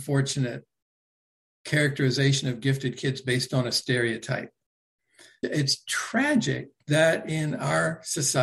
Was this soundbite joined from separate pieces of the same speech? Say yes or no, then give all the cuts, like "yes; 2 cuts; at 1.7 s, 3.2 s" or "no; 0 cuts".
yes; 1 cut; at 5.3 s